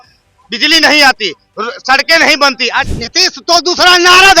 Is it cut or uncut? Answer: cut